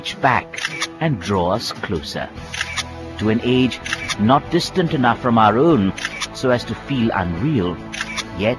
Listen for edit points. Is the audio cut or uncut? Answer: cut